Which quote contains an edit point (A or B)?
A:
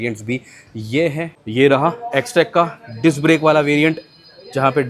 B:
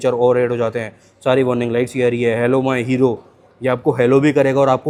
A